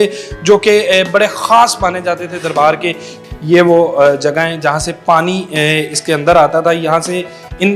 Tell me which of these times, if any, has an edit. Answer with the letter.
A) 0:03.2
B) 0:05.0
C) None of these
A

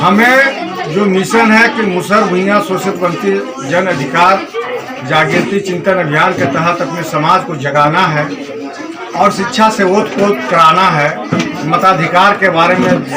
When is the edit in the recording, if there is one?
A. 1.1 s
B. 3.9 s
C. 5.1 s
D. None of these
D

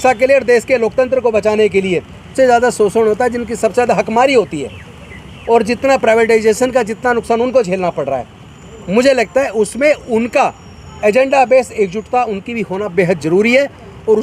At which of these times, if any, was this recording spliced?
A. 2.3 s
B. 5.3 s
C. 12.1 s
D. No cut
A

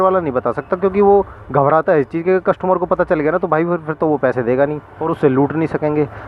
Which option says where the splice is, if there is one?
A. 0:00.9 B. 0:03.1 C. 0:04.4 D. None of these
D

